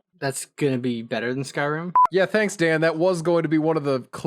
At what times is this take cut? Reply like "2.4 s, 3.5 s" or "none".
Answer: 2.0 s